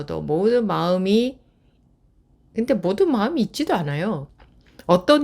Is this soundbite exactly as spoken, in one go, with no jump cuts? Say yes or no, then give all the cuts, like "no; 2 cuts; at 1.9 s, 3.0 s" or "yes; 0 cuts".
no; 1 cut; at 4.3 s